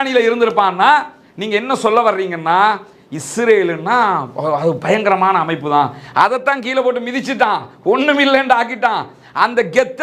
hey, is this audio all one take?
yes; 0 cuts

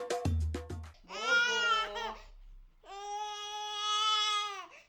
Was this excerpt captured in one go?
no; 1 cut; at 0.9 s

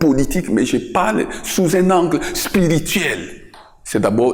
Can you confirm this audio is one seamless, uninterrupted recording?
yes; 0 cuts

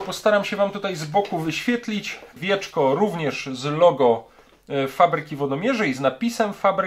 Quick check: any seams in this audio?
yes; 1 cut; at 2.4 s

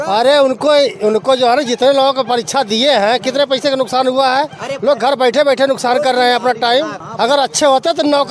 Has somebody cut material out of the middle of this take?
yes; 1 cut; at 7.0 s

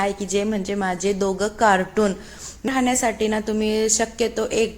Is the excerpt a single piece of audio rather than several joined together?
no; 1 cut; at 2.7 s

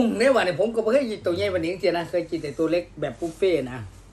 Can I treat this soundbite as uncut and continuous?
yes; 0 cuts

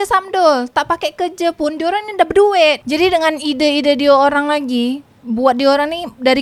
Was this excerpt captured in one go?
yes; 0 cuts

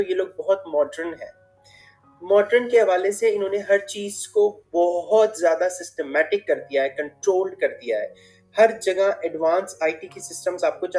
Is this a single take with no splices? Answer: yes; 0 cuts

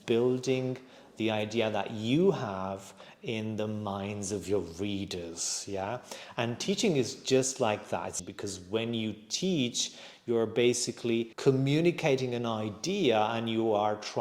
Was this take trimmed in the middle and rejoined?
yes; 2 cuts; at 8.1 s, 11.3 s

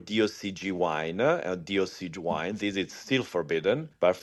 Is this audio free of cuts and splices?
yes; 0 cuts

